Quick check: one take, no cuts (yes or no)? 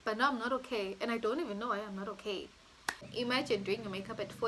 no